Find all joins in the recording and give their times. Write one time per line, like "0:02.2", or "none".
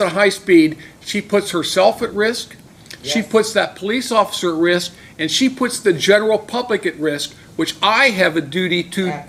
none